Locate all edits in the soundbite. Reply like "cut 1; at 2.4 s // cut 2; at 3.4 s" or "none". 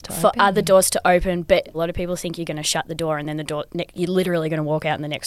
cut 1; at 1.7 s